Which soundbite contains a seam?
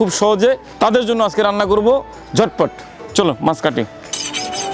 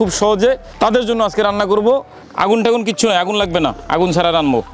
second; 1 cut; at 2.2 s

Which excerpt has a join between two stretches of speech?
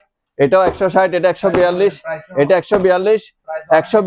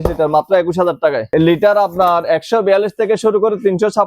second; 1 cut; at 1.3 s

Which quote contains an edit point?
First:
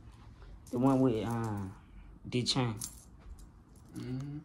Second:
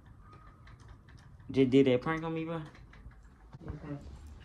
second; 1 cut; at 3.5 s

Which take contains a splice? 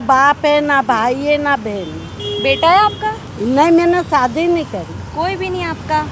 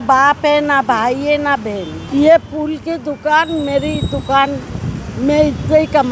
second; 1 cut; at 1.9 s

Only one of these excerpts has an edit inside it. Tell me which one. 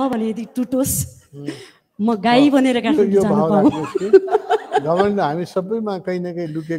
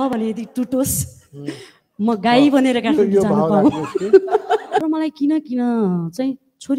second; 1 cut; at 4.8 s

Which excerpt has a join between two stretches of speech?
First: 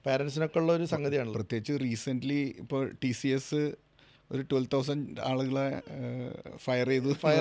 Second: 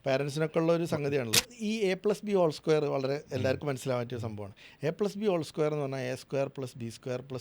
second; 1 cut; at 1.5 s

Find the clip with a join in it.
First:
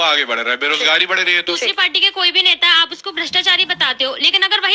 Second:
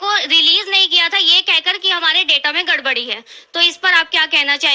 first; 1 cut; at 1.7 s

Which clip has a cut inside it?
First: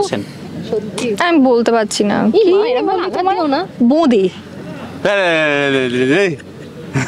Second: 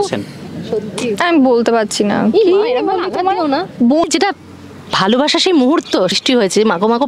second; 2 cuts; at 4.1 s, 6.1 s

